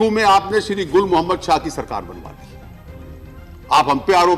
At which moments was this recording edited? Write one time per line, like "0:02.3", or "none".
0:02.3
0:03.7